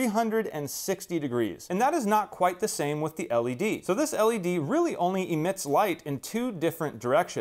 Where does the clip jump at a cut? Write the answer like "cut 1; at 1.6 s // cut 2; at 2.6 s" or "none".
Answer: cut 1; at 3.8 s